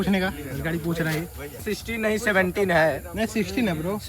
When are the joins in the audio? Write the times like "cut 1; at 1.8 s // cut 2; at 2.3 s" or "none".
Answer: cut 1; at 1.6 s